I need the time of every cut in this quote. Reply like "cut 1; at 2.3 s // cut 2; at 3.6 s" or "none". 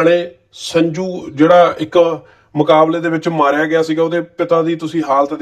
none